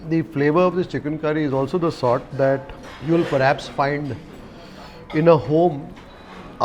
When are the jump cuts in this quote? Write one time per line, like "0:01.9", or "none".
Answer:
none